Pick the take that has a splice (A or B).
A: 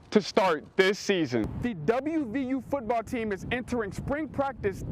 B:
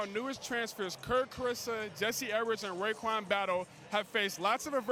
A